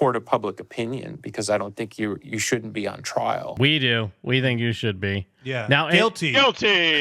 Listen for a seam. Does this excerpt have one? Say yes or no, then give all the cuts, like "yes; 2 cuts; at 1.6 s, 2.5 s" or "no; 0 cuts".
yes; 1 cut; at 3.5 s